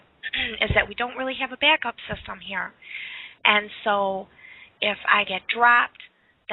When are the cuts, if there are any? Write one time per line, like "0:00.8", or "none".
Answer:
0:02.2

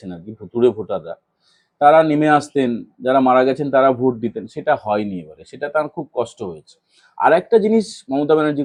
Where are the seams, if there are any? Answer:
none

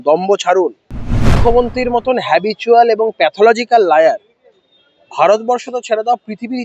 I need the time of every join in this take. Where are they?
0:01.4

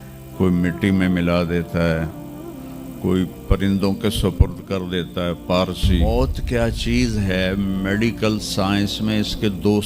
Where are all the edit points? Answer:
0:06.0

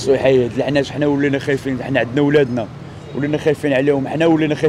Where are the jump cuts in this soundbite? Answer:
none

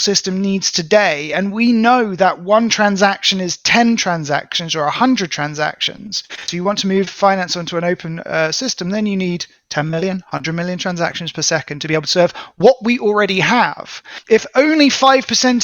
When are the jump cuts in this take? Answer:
0:06.5
0:14.1

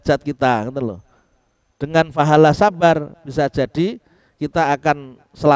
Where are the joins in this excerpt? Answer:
none

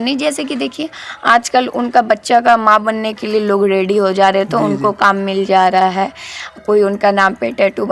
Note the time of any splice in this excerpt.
none

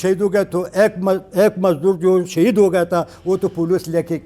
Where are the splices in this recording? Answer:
none

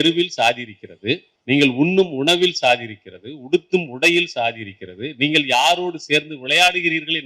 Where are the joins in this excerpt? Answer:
0:01.3

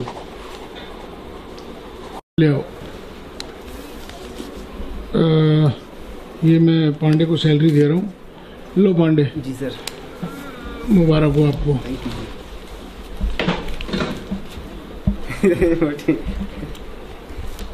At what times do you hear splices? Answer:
0:02.4

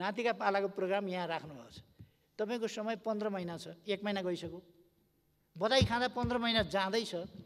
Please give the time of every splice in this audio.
none

